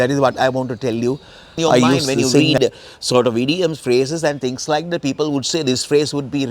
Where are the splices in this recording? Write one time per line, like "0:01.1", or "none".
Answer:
0:02.4